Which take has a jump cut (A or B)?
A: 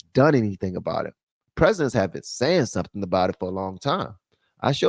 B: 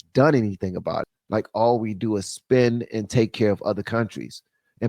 B